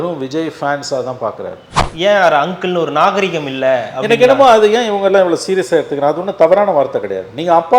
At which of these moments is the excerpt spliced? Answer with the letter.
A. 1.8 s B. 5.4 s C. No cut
A